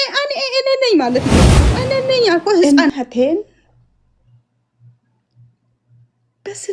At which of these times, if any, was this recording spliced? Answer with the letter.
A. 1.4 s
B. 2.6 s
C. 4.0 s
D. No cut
B